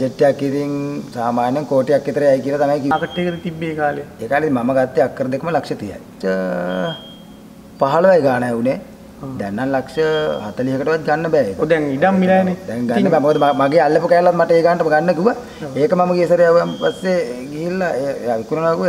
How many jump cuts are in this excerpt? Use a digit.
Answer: 2